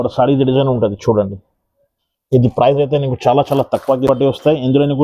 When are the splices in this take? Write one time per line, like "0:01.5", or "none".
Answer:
0:04.1